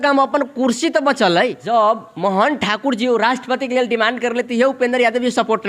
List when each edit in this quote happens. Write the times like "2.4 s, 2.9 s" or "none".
1.6 s